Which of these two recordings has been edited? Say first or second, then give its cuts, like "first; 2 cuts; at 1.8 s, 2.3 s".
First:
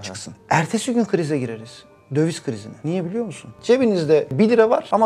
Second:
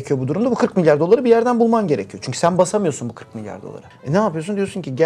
first; 1 cut; at 3.5 s